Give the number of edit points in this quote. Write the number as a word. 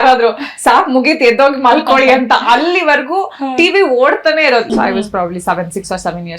one